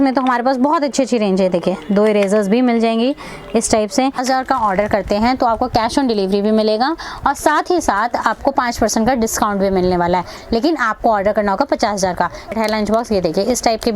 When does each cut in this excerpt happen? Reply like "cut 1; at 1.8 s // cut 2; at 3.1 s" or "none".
cut 1; at 4.2 s // cut 2; at 12.5 s